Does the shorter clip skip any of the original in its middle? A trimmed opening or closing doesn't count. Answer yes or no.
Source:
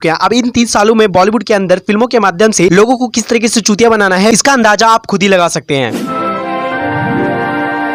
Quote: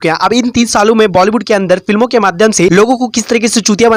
no